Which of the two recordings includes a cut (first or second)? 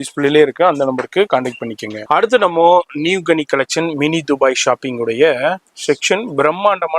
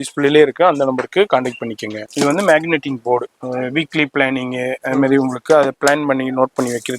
second